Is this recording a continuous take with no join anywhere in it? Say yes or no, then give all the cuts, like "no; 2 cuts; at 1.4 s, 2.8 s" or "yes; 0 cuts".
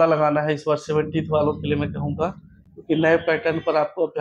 yes; 0 cuts